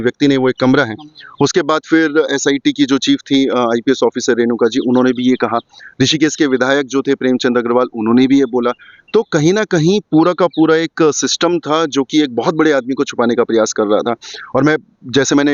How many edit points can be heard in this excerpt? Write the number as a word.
zero